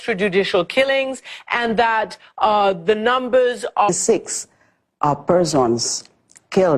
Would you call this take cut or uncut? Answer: uncut